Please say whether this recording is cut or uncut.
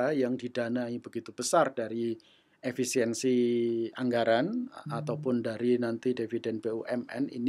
uncut